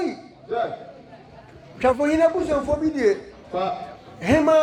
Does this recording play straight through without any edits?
yes; 0 cuts

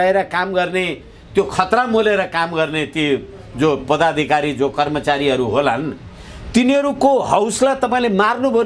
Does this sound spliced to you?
no; 0 cuts

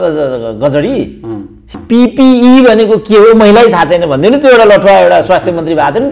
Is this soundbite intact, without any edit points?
no; 1 cut; at 1.7 s

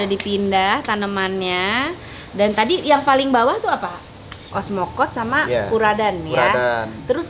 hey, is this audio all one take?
no; 1 cut; at 4.4 s

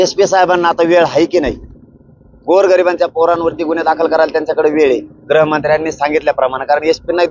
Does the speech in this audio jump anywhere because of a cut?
no; 0 cuts

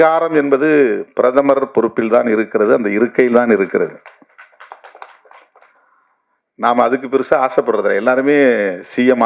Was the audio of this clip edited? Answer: no; 0 cuts

